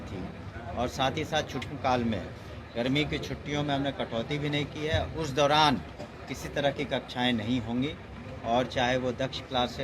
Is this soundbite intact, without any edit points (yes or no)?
no